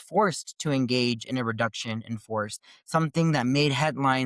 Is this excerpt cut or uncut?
uncut